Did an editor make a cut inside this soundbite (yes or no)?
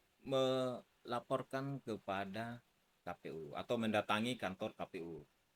no